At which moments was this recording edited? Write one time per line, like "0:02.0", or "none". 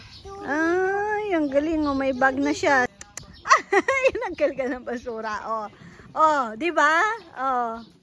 0:02.9